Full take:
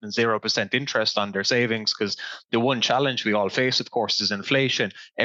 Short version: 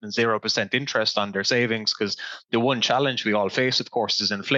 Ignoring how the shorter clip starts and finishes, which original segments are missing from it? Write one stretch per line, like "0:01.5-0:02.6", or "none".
none